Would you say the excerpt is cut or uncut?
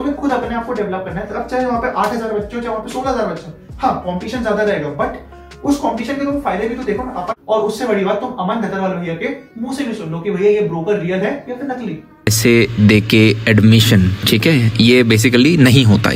cut